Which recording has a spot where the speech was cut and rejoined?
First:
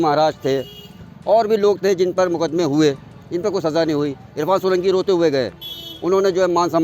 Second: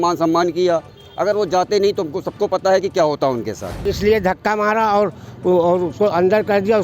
second; 1 cut; at 3.8 s

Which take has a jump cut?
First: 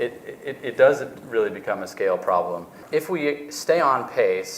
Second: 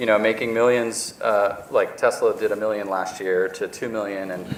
first; 1 cut; at 2.8 s

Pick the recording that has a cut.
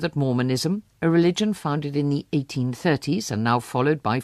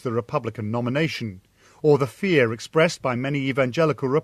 second; 1 cut; at 1.5 s

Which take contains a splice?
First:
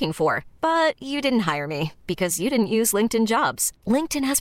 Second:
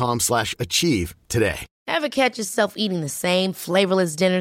second; 1 cut; at 1.7 s

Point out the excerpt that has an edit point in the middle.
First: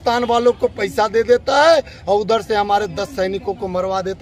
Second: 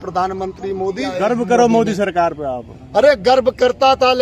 second; 1 cut; at 1.1 s

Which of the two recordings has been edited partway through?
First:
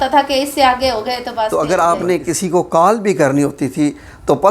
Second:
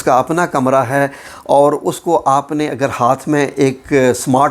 first; 1 cut; at 1.5 s

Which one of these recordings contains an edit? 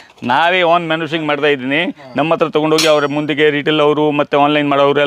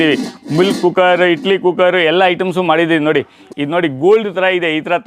second; 1 cut; at 3.4 s

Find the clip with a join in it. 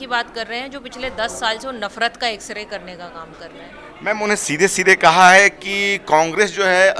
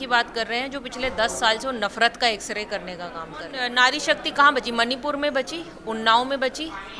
second; 1 cut; at 3.7 s

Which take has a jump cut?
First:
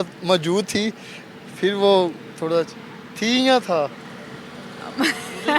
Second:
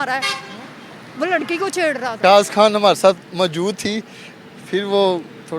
second; 1 cut; at 2.2 s

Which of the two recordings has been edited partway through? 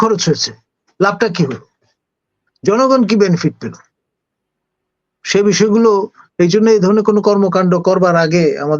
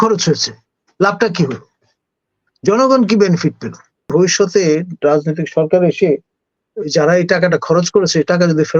second; 1 cut; at 4.1 s

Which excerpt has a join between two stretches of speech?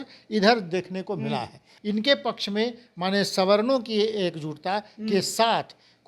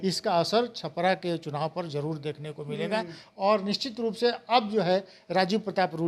first; 1 cut; at 1.7 s

